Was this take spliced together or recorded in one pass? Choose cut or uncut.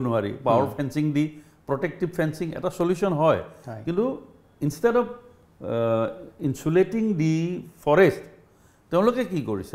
uncut